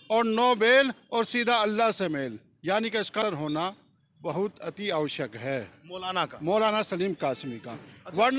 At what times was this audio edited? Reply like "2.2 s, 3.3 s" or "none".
none

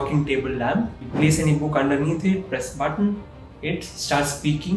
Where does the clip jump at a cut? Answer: 1.0 s

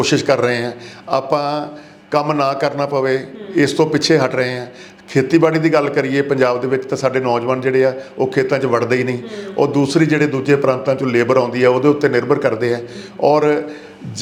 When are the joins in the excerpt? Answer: none

